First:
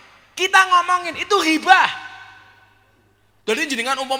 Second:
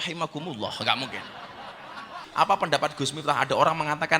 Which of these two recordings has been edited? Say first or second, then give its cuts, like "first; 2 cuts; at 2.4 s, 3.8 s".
second; 1 cut; at 2.2 s